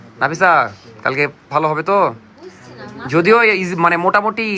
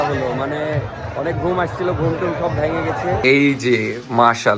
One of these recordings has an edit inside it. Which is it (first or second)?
second